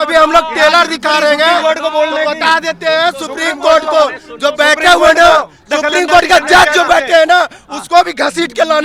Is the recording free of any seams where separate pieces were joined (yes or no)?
yes